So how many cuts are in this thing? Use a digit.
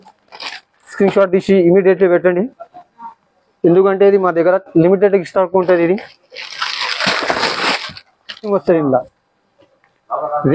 1